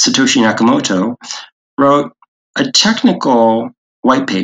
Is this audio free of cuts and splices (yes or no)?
yes